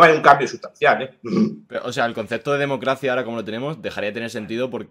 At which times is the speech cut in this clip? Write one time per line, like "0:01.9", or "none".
none